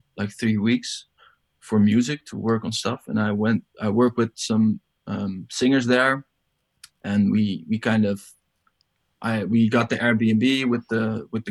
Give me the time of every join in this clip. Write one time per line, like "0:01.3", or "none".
none